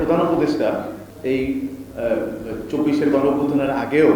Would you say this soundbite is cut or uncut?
cut